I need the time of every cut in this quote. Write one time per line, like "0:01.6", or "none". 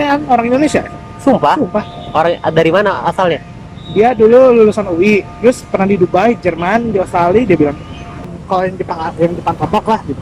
0:08.1